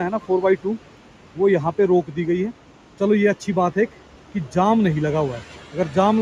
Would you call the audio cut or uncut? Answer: uncut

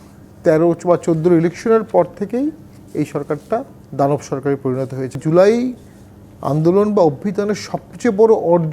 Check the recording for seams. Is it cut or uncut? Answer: cut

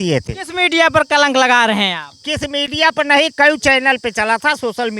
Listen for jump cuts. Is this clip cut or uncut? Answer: uncut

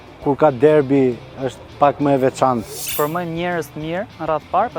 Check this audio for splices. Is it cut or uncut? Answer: cut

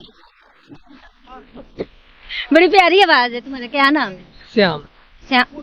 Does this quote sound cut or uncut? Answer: uncut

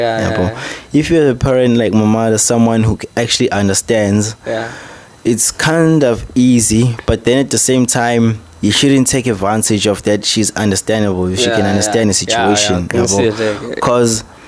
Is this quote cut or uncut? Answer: uncut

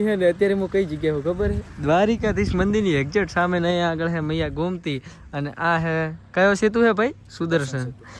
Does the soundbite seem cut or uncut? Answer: uncut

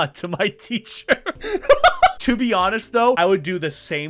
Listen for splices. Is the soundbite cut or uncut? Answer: cut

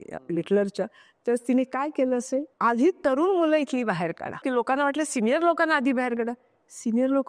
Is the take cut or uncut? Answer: cut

